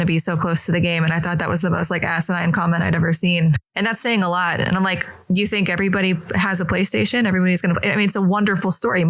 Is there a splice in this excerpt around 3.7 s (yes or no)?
yes